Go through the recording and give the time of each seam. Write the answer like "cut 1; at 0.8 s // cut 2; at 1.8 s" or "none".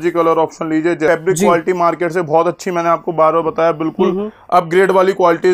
cut 1; at 1.1 s